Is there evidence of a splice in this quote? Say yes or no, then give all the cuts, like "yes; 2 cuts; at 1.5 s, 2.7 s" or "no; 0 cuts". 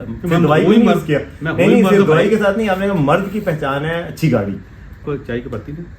yes; 1 cut; at 5.0 s